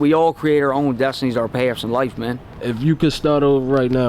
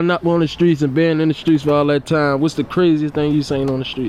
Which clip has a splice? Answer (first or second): first